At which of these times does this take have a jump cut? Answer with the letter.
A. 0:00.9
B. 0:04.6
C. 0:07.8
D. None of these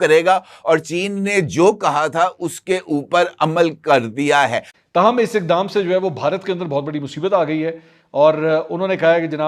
B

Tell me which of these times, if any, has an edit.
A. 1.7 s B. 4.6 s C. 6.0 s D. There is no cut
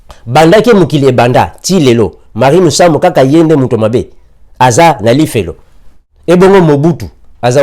C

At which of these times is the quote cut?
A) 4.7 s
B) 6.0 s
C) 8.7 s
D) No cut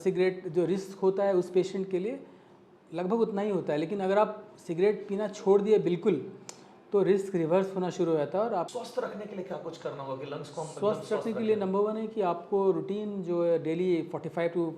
C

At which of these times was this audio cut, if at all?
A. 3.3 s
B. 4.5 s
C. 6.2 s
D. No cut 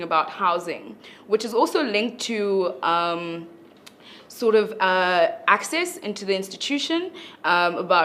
D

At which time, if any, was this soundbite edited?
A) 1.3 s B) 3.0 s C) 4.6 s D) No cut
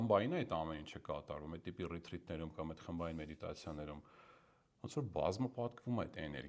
D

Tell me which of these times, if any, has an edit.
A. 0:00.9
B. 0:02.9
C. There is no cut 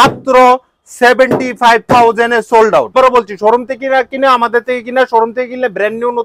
B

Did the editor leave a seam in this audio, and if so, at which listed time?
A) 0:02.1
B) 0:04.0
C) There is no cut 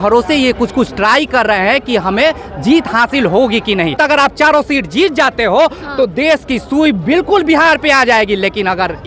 B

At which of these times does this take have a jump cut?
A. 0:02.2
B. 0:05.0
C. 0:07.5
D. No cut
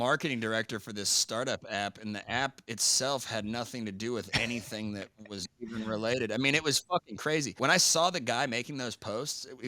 C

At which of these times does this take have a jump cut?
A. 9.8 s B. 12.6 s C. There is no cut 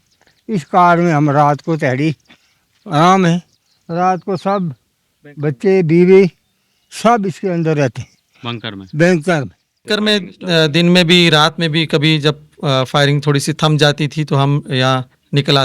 A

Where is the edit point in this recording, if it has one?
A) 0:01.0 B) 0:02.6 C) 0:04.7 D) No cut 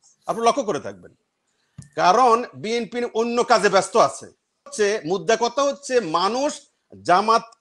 C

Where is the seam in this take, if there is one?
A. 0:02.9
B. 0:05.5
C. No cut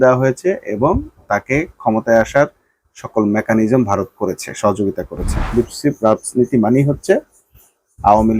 B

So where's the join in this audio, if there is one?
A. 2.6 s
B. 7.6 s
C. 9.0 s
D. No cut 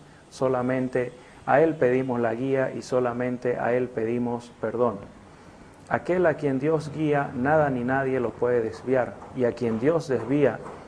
B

